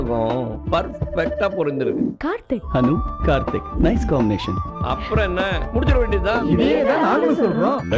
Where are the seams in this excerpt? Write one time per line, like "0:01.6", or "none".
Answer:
none